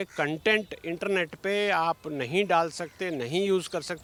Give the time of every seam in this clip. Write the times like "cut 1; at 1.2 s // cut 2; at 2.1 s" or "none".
none